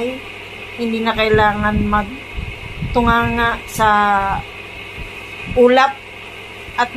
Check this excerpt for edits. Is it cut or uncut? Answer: cut